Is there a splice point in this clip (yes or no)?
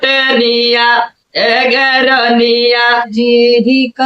yes